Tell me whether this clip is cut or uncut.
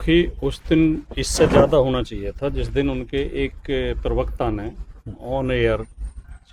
uncut